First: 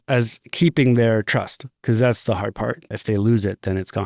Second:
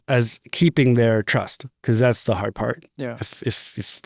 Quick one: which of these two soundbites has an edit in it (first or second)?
first